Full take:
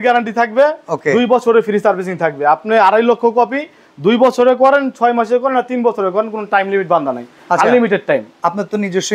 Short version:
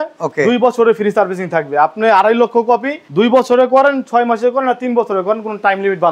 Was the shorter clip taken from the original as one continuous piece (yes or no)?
no